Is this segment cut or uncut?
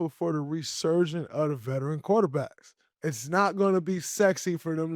cut